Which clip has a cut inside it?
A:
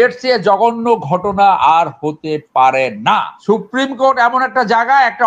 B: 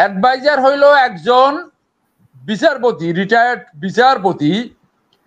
A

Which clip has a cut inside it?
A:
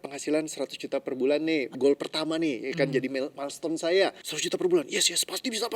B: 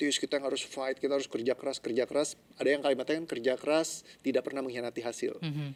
A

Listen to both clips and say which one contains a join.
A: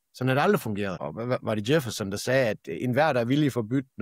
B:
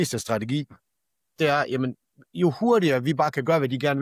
A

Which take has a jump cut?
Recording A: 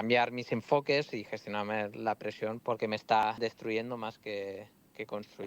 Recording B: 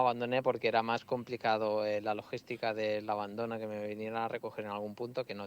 A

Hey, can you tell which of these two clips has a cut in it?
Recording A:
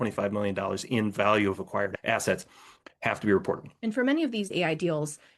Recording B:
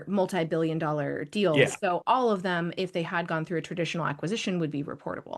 A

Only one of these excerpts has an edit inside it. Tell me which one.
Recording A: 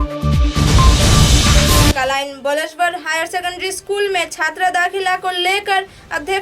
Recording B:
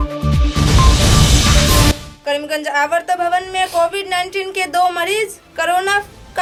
A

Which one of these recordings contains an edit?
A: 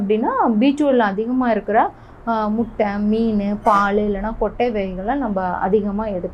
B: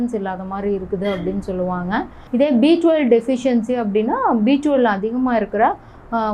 B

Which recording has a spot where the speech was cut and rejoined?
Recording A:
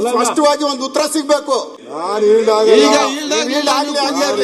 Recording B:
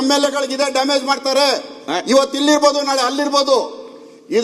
A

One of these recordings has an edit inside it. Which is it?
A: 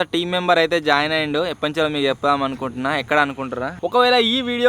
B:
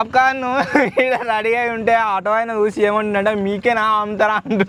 A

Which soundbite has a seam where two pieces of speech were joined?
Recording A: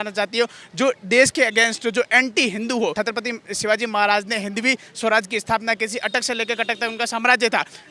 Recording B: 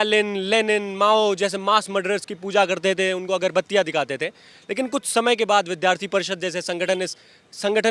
A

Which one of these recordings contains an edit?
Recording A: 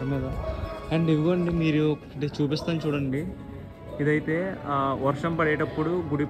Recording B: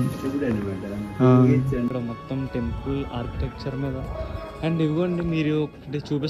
B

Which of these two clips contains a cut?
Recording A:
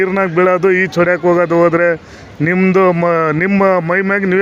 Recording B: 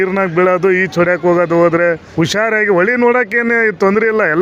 B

